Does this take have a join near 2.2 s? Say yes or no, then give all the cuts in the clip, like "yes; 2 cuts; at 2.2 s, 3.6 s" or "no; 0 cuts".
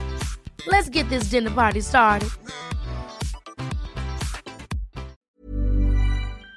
no; 1 cut; at 5.2 s